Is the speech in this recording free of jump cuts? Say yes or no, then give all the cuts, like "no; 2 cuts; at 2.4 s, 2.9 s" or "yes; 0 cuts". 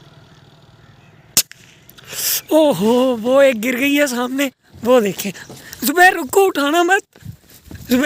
yes; 0 cuts